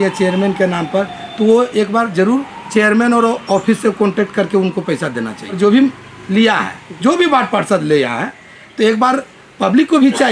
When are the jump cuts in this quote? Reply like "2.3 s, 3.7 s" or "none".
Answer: 5.6 s